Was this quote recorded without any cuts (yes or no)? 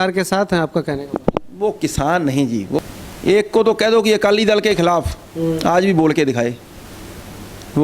no